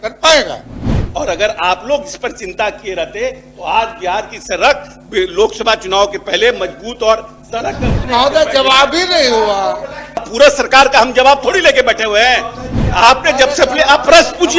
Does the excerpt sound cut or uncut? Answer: cut